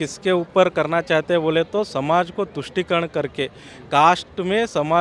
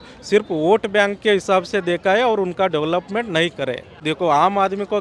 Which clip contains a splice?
second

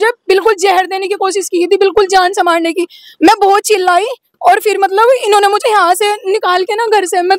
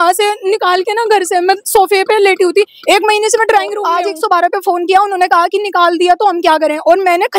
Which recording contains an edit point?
second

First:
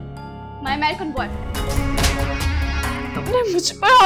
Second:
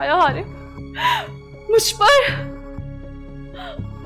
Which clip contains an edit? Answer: first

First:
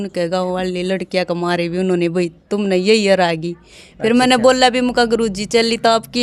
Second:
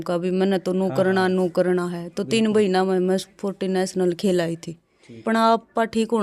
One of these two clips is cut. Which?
second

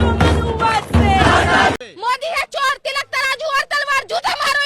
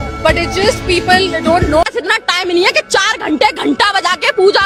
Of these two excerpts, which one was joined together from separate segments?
first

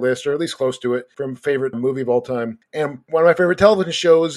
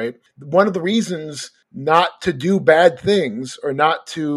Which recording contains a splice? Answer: first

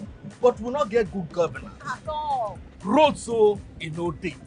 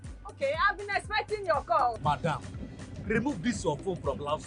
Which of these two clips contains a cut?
first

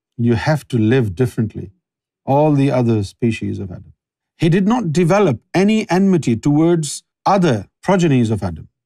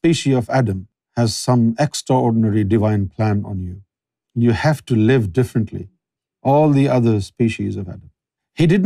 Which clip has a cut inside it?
first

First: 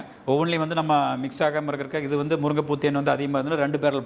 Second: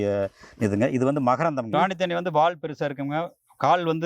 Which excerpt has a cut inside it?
second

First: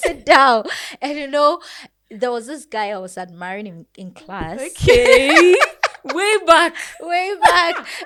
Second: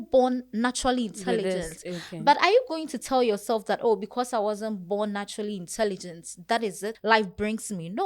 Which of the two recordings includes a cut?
second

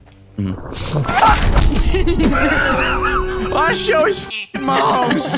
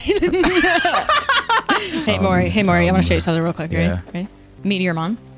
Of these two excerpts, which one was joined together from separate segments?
second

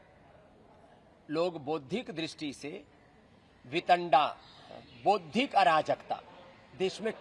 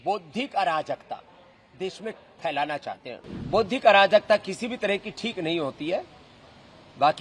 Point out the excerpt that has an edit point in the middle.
second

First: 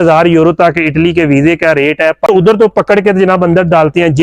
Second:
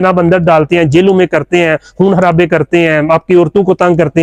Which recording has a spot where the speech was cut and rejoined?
first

